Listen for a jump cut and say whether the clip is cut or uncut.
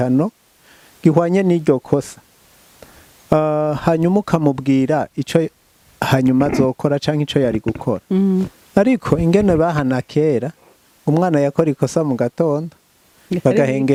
uncut